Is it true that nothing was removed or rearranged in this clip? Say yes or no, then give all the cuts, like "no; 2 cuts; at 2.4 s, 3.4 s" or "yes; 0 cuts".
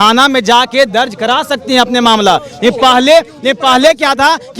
yes; 0 cuts